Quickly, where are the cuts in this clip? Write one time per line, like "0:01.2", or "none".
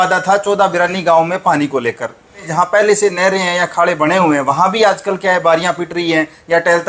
0:02.5